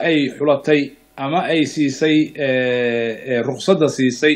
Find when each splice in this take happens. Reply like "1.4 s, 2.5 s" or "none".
none